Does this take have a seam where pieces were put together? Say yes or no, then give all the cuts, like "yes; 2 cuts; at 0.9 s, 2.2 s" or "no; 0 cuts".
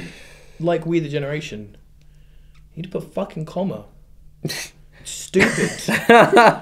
no; 0 cuts